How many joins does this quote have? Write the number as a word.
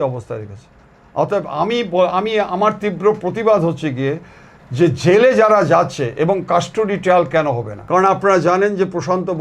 one